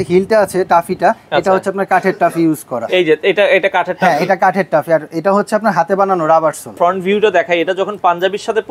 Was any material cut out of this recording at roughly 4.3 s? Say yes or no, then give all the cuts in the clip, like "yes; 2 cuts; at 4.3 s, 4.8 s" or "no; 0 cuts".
no; 1 cut; at 6.8 s